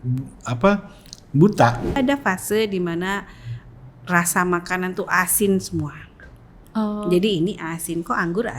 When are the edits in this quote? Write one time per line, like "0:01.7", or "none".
0:01.9